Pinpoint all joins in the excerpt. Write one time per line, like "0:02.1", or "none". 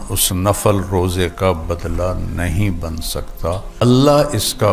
0:03.8